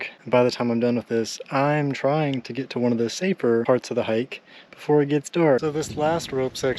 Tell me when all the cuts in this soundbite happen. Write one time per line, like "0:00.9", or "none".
0:03.6
0:05.6